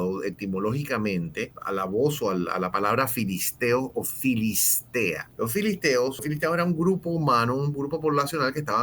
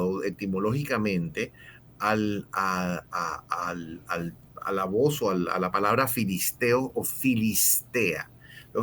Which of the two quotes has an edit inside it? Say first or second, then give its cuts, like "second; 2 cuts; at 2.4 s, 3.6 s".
first; 3 cuts; at 1.6 s, 5.2 s, 6.2 s